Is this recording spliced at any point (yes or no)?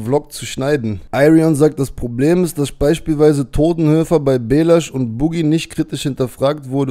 yes